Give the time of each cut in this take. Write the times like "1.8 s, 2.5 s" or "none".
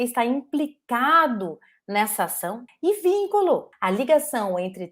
2.7 s, 3.7 s